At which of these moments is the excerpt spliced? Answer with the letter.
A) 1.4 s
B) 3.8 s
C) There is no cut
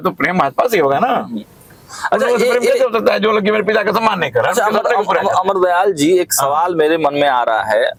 C